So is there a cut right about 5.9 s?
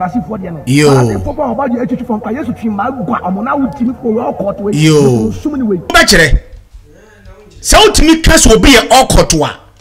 yes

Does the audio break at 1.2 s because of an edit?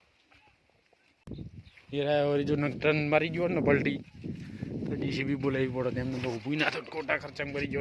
yes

